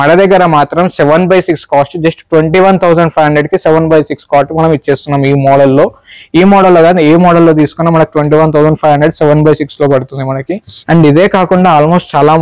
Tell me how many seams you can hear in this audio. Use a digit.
0